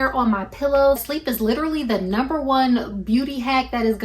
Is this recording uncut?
no; 1 cut; at 1.0 s

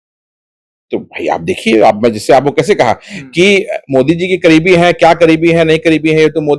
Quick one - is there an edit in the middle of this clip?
no; 0 cuts

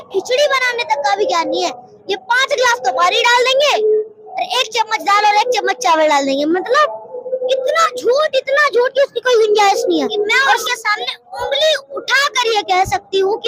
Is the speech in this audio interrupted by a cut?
yes; 1 cut; at 10.6 s

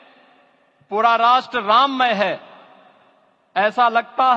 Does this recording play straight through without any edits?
yes; 0 cuts

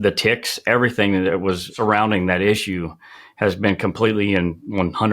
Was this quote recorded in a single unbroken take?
no; 1 cut; at 1.7 s

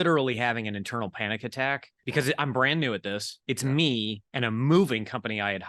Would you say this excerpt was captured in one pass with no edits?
no; 3 cuts; at 1.9 s, 3.3 s, 4.2 s

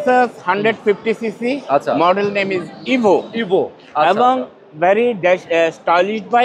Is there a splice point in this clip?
no; 0 cuts

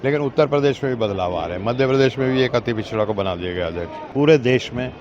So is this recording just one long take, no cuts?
no; 1 cut; at 4.0 s

